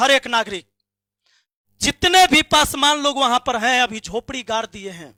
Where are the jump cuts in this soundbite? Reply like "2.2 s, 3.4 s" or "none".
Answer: none

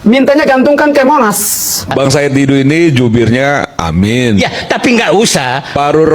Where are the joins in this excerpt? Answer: 1.9 s

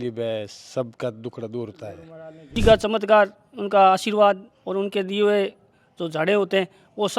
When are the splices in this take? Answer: 2.5 s

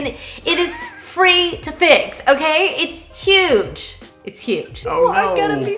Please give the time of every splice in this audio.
4.7 s

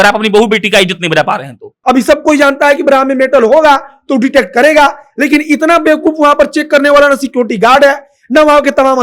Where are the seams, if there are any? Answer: 1.7 s

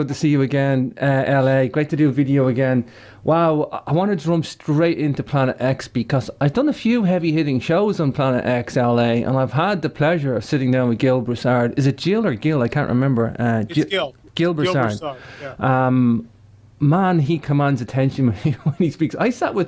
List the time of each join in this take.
none

